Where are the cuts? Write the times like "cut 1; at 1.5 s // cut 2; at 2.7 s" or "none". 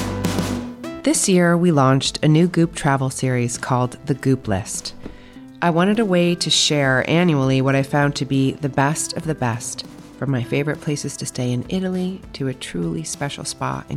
cut 1; at 1.0 s